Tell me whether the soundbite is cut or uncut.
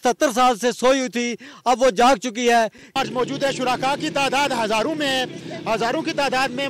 cut